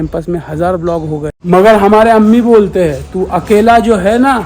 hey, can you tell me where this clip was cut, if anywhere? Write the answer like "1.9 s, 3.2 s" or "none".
1.3 s